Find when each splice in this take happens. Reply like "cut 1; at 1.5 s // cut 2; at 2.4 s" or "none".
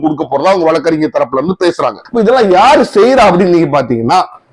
cut 1; at 2.0 s